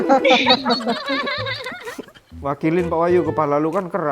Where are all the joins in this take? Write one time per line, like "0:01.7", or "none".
0:02.2